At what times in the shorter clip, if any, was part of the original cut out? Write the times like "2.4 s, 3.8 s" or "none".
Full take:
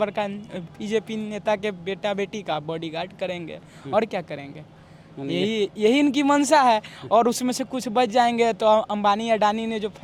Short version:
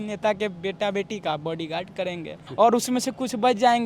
2.4 s